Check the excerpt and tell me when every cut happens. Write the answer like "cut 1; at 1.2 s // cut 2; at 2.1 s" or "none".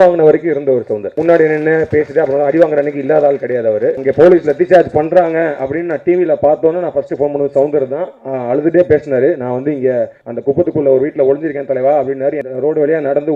cut 1; at 1.2 s // cut 2; at 4.0 s // cut 3; at 10.2 s // cut 4; at 12.4 s